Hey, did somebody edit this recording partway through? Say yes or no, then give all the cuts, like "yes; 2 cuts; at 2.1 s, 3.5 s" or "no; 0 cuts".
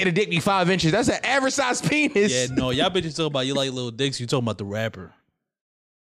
no; 0 cuts